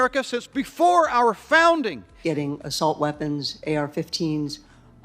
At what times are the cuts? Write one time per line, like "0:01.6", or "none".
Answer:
0:02.1